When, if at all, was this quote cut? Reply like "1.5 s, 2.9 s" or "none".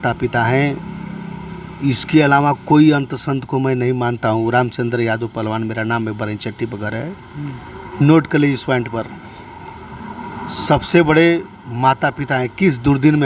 none